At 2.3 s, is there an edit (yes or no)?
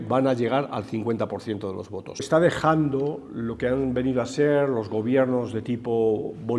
yes